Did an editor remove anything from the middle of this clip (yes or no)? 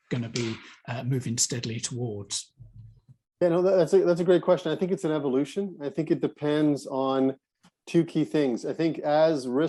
no